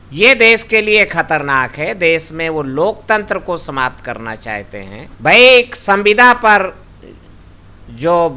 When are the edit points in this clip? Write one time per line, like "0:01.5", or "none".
0:05.0

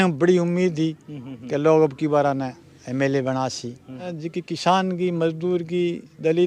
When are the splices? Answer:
0:04.1

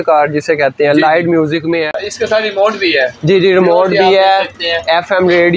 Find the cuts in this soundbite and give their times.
0:02.0

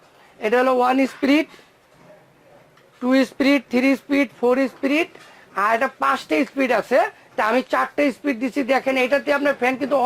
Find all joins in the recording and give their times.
none

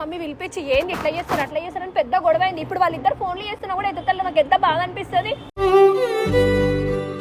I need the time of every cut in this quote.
none

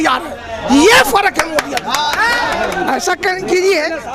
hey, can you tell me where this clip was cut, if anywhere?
0:02.5

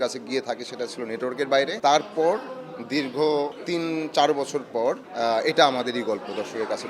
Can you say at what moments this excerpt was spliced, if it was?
none

